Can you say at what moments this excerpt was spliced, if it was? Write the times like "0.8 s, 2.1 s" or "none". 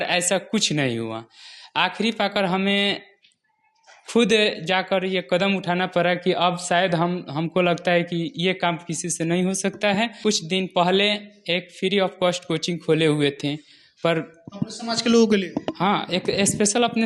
10.2 s